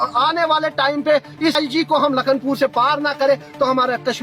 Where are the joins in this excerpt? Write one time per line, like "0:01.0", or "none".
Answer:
0:01.5